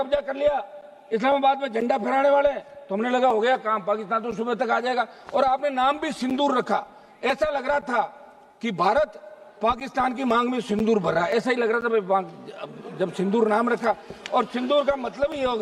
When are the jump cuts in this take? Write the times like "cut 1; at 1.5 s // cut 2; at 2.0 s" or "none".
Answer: none